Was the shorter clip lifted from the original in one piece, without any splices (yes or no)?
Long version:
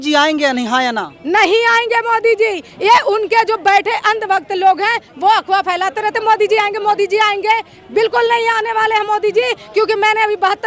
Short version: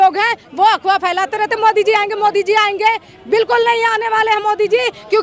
yes